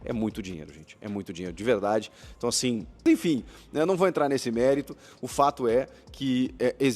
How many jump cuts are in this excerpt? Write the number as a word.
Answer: one